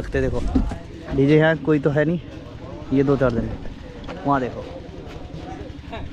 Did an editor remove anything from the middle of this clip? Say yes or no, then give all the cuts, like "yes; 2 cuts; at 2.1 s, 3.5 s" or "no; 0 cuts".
no; 0 cuts